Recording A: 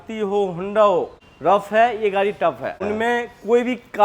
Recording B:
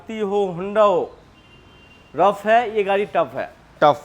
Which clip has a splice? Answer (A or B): A